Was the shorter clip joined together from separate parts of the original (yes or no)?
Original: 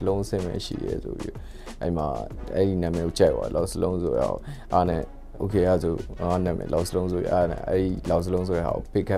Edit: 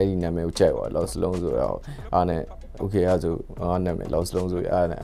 no